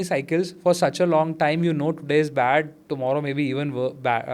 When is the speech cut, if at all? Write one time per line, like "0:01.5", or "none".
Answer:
none